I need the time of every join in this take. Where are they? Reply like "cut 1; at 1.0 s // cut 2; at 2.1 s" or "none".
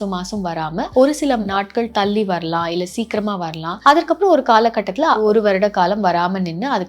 cut 1; at 0.9 s // cut 2; at 1.5 s // cut 3; at 3.7 s // cut 4; at 5.2 s

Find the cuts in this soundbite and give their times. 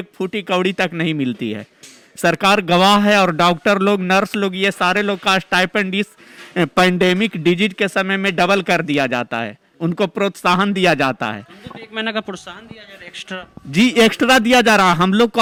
none

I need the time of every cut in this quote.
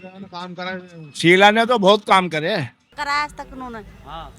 cut 1; at 2.9 s

